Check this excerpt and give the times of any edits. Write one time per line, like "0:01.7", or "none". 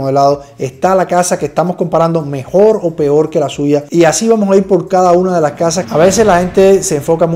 0:05.8